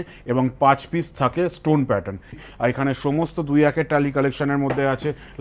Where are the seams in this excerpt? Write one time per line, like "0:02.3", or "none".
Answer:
0:02.4